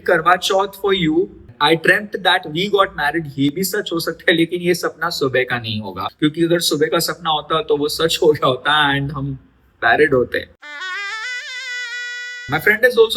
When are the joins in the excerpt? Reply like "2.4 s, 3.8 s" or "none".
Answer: 1.5 s, 6.1 s, 10.6 s, 12.0 s